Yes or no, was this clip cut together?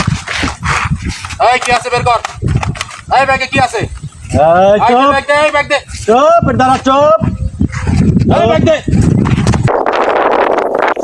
yes